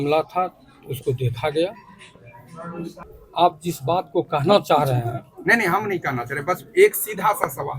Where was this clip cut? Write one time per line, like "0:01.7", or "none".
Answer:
0:03.0